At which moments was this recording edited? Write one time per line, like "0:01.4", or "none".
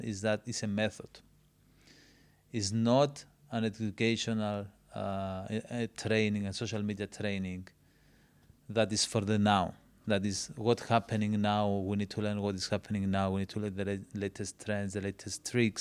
none